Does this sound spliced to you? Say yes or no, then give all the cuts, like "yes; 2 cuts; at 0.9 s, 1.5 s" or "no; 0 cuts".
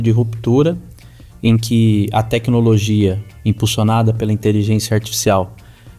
no; 0 cuts